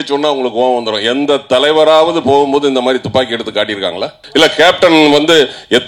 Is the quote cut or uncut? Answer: cut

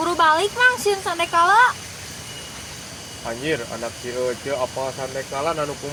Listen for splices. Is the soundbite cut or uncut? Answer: uncut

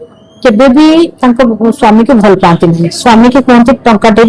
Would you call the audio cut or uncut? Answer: uncut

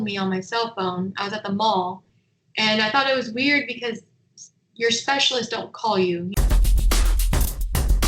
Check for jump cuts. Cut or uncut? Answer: cut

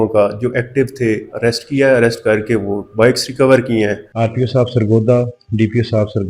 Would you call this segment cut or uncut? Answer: cut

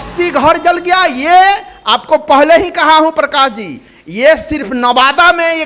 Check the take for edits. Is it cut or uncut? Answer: uncut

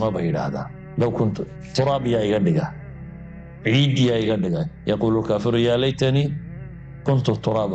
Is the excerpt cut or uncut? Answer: uncut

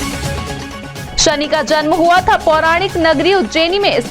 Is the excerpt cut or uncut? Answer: cut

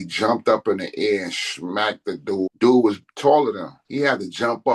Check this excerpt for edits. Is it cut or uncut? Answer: cut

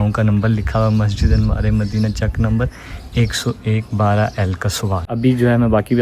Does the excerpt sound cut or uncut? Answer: cut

